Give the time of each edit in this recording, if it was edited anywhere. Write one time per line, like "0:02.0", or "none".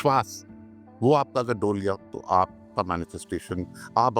none